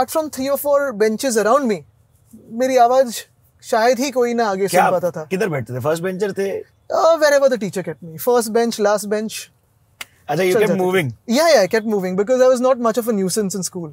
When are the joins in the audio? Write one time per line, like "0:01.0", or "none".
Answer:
none